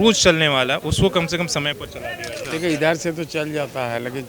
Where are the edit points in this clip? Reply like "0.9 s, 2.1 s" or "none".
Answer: 2.5 s